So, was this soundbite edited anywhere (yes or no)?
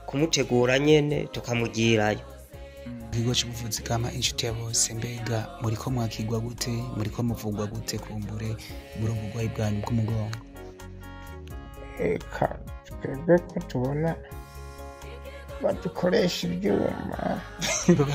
yes